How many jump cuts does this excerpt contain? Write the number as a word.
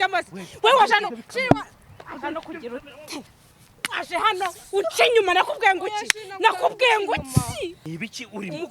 one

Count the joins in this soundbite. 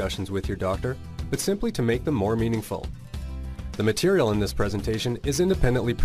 one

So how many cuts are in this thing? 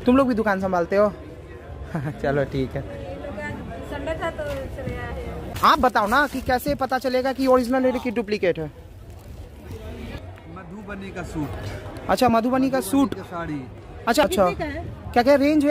three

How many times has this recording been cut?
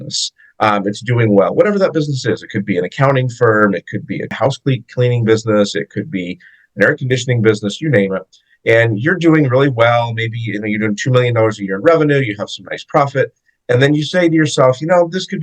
one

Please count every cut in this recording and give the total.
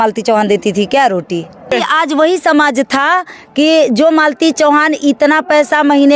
one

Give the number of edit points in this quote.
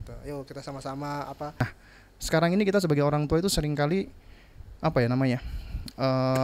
one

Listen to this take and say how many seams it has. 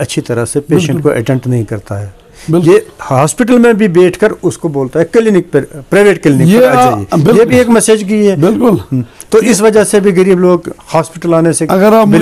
zero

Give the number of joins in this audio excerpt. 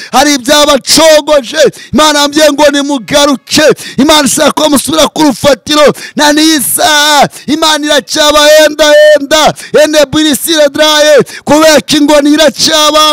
zero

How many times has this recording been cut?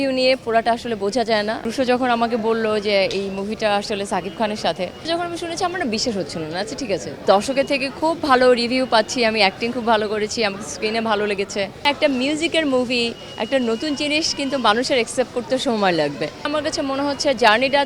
five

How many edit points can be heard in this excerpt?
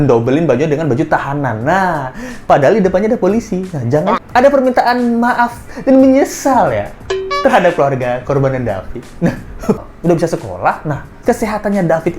two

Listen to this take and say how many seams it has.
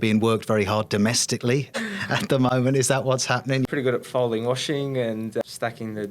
three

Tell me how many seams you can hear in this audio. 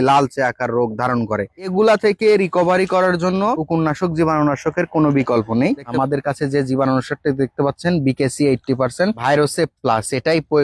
one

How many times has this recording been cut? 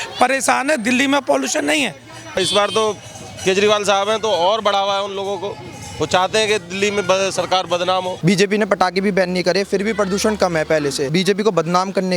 three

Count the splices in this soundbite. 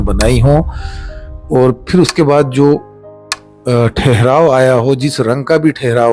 zero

